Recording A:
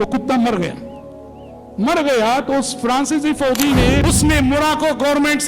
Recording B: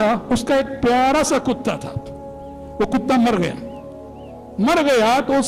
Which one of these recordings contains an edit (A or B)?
A